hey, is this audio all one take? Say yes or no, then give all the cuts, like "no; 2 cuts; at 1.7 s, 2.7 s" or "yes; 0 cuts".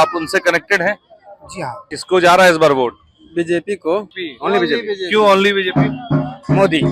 no; 2 cuts; at 1.9 s, 4.3 s